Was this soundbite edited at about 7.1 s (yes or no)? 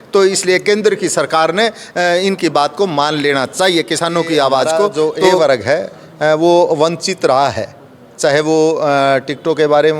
no